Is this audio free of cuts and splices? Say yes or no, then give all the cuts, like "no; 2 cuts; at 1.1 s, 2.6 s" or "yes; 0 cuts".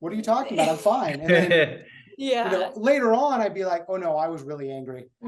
yes; 0 cuts